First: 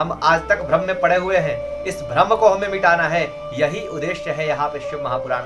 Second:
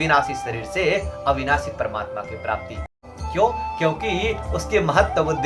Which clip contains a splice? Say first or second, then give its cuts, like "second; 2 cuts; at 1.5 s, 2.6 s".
second; 1 cut; at 2.9 s